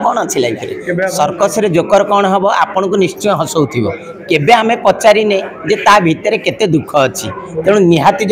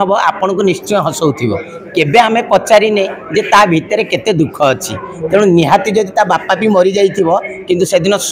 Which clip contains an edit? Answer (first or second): first